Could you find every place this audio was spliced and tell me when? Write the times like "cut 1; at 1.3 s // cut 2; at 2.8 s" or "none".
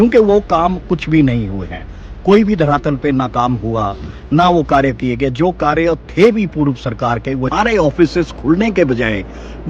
cut 1; at 7.5 s

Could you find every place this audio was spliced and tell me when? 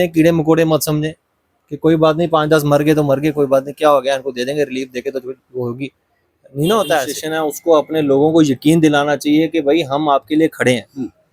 cut 1; at 7.2 s

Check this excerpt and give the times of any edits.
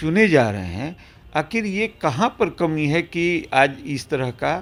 none

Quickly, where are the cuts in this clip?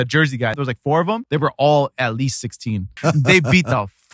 cut 1; at 0.9 s // cut 2; at 3.0 s

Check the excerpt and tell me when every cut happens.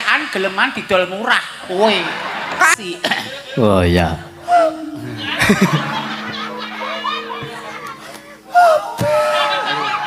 cut 1; at 2.8 s

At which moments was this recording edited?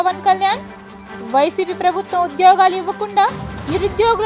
none

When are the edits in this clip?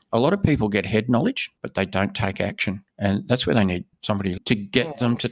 cut 1; at 1.5 s // cut 2; at 2.9 s // cut 3; at 4.4 s

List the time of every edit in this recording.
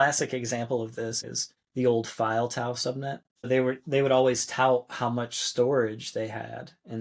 cut 1; at 1.2 s // cut 2; at 3.5 s

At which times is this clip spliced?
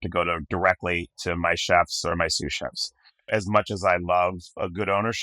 cut 1; at 3.3 s

